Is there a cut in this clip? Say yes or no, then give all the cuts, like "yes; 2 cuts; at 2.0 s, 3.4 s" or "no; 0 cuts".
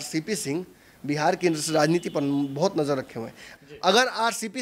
yes; 1 cut; at 3.5 s